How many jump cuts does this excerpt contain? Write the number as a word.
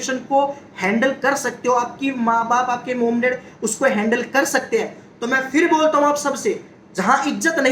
zero